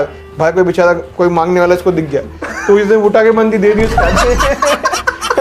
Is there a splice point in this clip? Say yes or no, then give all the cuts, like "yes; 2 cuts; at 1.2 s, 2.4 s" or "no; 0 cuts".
no; 0 cuts